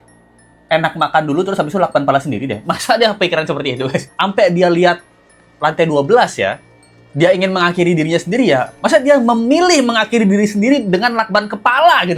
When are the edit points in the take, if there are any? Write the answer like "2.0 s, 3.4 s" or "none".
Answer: 4.1 s